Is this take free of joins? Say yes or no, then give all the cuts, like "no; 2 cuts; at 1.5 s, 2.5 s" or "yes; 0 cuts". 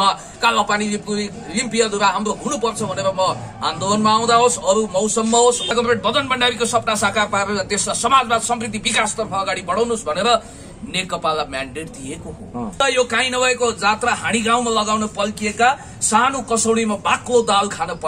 no; 2 cuts; at 5.7 s, 12.8 s